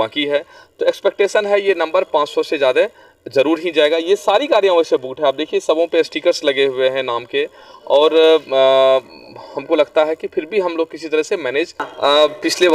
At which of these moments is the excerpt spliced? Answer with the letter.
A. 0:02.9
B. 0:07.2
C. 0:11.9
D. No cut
C